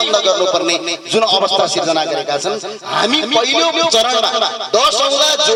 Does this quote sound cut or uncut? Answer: uncut